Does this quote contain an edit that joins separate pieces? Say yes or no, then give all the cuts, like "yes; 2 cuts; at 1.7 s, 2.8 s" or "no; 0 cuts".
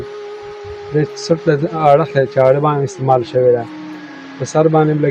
no; 0 cuts